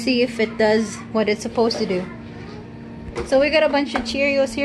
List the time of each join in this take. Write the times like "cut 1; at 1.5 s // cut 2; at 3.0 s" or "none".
cut 1; at 3.1 s